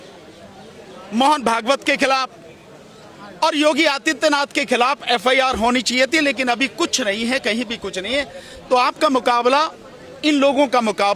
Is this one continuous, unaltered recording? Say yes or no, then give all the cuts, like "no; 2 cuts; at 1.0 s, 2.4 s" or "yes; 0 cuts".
yes; 0 cuts